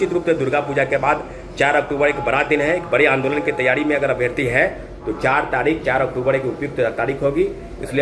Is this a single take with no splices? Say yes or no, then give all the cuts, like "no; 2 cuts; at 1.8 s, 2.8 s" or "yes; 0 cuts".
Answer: yes; 0 cuts